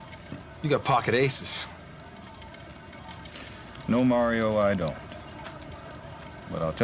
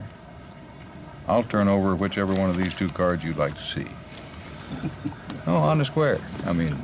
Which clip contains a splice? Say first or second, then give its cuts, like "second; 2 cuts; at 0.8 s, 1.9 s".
second; 1 cut; at 4.6 s